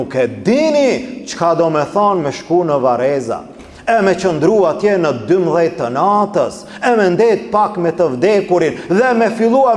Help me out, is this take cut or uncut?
uncut